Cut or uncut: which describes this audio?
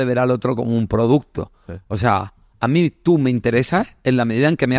uncut